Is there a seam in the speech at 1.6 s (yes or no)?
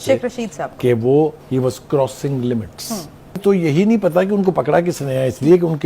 no